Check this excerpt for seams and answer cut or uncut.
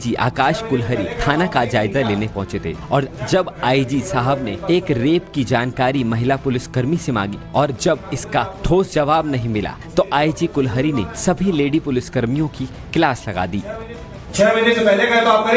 uncut